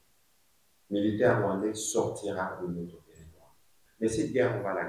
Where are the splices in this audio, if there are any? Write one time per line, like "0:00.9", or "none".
0:03.8